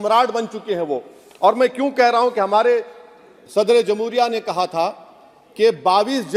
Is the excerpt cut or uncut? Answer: uncut